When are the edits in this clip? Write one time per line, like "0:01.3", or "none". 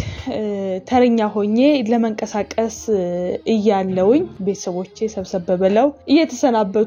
0:03.4
0:04.3
0:06.0